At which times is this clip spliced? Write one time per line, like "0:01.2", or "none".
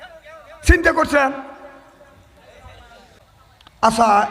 0:03.2